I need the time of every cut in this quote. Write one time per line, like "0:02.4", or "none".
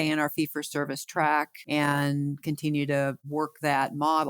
0:01.6